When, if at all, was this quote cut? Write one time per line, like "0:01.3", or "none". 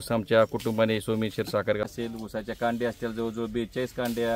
0:01.8

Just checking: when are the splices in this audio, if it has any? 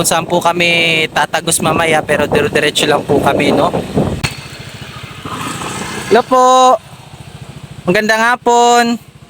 0:04.2

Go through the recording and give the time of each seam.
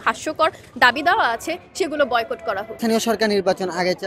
0:02.7

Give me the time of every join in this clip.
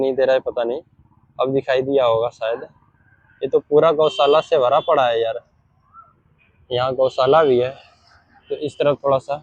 none

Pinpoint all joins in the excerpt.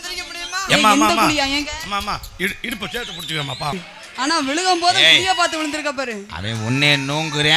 0:03.7

